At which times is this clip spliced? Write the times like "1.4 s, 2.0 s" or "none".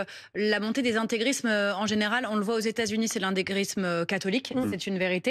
none